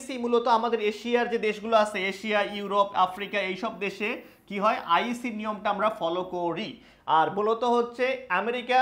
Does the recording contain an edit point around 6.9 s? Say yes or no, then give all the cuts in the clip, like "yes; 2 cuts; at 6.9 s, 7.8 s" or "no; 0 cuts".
no; 0 cuts